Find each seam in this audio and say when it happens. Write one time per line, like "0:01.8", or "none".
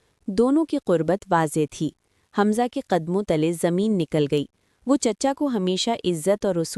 none